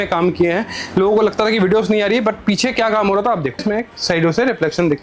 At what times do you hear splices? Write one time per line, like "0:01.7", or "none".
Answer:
0:03.6

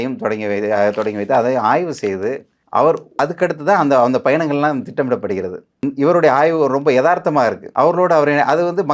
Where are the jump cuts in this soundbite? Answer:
0:02.5
0:03.2
0:05.8
0:07.6

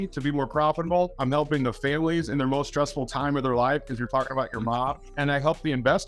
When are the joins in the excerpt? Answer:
0:01.1
0:05.1

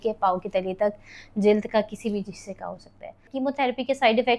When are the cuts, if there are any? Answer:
0:03.2

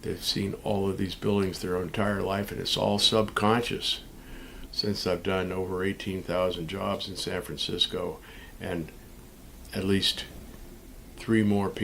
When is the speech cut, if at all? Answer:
0:04.7

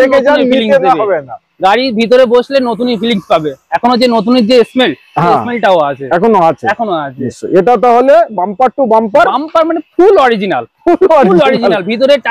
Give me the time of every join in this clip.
none

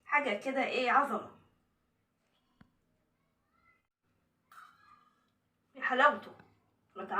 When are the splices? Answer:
0:04.0

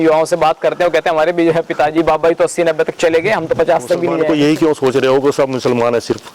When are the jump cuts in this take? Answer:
0:04.2

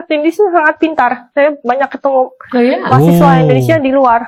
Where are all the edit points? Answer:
none

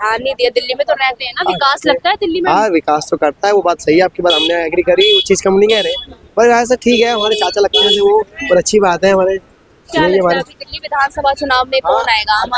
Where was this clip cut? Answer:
none

